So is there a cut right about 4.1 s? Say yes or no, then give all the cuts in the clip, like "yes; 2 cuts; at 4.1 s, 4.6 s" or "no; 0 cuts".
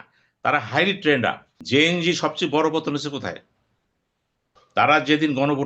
no; 1 cut; at 1.5 s